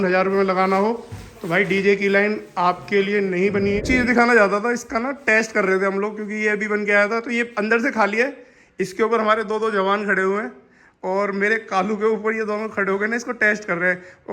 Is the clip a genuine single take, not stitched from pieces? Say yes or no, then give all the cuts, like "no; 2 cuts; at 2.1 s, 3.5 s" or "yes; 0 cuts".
no; 1 cut; at 3.8 s